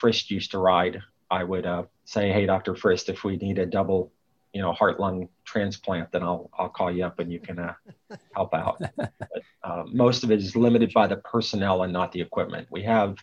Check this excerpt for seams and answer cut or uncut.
cut